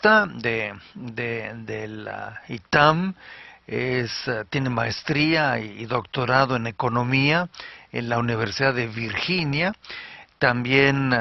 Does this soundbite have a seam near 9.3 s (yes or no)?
yes